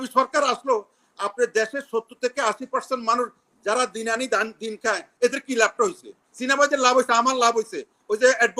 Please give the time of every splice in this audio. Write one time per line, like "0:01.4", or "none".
none